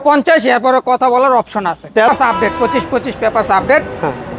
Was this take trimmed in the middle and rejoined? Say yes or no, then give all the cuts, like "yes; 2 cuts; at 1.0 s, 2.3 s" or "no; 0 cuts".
yes; 1 cut; at 2.1 s